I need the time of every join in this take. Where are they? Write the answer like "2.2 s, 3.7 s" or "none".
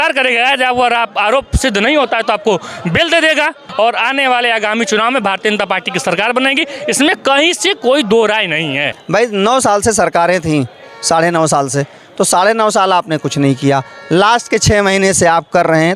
3.6 s, 8.9 s